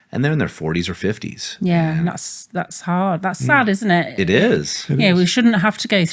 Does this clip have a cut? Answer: no; 0 cuts

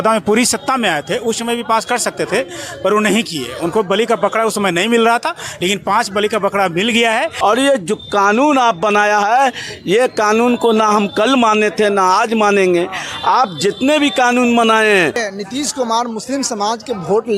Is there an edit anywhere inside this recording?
yes; 2 cuts; at 7.3 s, 15.2 s

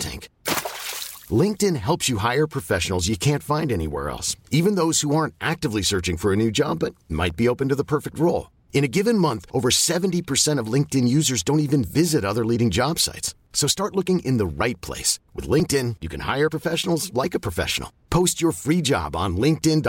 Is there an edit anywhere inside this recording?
no; 0 cuts

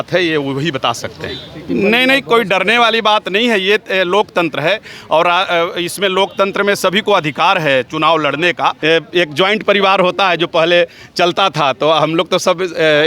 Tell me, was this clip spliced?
yes; 2 cuts; at 1.6 s, 8.8 s

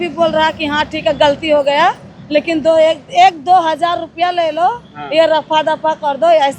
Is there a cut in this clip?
no; 0 cuts

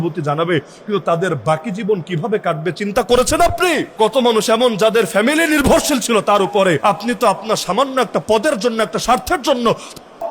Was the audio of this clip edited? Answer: yes; 2 cuts; at 3.9 s, 6.8 s

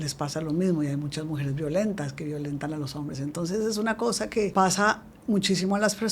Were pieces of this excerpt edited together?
yes; 1 cut; at 4.5 s

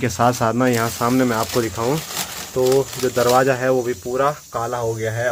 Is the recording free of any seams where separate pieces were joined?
yes; 0 cuts

